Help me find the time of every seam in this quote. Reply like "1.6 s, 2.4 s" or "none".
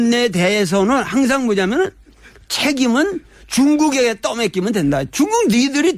none